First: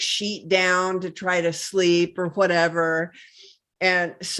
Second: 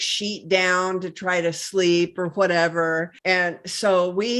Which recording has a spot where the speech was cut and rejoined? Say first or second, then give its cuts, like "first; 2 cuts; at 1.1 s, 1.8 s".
second; 1 cut; at 3.1 s